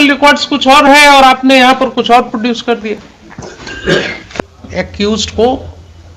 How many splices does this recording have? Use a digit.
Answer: 1